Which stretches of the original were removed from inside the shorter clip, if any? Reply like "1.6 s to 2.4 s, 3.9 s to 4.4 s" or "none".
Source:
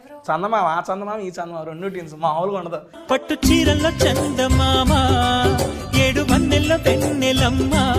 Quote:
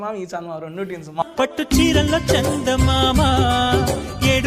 2.3 s to 2.9 s